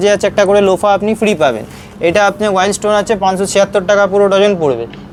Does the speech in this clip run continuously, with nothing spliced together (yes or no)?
yes